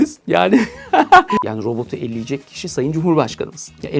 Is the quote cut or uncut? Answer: cut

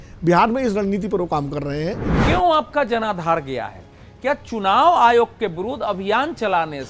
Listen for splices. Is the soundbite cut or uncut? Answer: cut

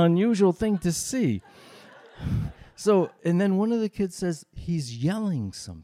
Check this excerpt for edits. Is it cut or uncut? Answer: cut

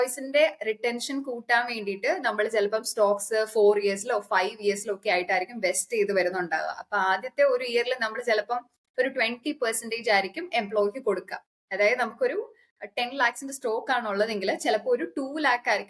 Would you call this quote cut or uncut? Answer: uncut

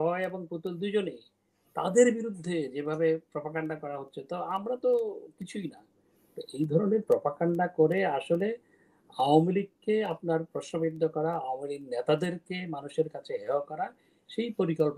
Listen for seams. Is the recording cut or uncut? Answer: uncut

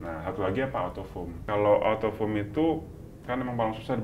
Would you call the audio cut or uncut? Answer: cut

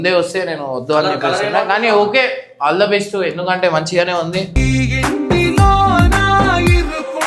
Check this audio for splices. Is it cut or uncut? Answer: uncut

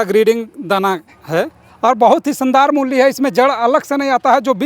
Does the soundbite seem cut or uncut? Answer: cut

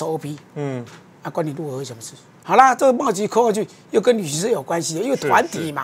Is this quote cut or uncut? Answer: cut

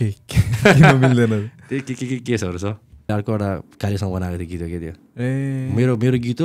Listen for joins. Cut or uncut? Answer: cut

